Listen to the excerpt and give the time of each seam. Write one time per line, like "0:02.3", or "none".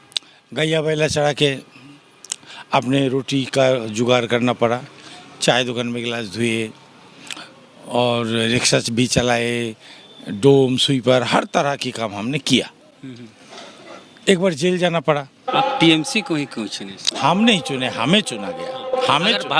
0:15.4